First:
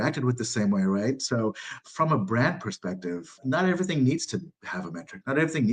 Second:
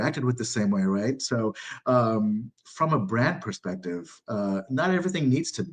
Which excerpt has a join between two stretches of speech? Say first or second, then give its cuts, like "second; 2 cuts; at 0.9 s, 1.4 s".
first; 2 cuts; at 1.7 s, 3.4 s